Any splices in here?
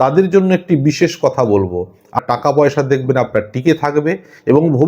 yes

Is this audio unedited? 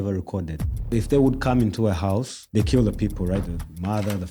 no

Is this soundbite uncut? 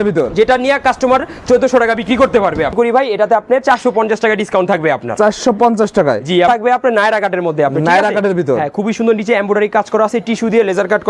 no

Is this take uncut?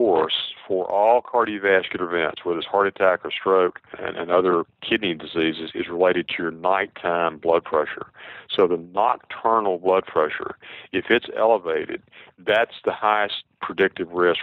yes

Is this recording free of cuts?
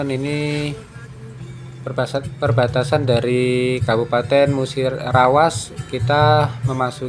yes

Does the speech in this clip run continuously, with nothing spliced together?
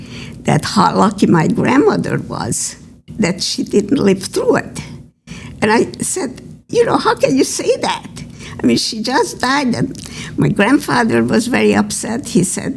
no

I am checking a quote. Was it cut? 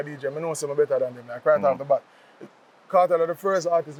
no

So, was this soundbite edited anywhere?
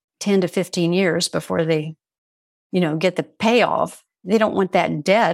yes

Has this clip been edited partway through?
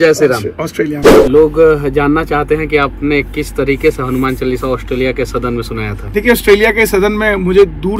yes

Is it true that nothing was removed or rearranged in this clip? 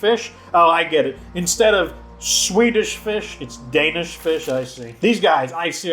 no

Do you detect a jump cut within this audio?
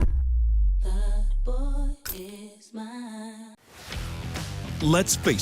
yes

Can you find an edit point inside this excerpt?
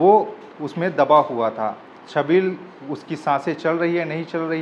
no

